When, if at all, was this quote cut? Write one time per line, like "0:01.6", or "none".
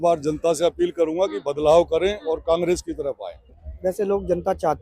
0:03.6